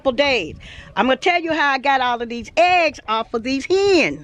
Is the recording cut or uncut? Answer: uncut